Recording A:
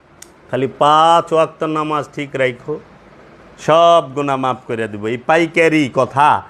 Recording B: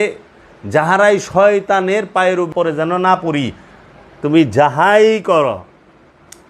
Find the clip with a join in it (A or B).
B